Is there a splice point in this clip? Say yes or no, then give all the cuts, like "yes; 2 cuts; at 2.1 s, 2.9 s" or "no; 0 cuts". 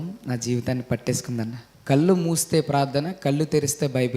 yes; 1 cut; at 1.7 s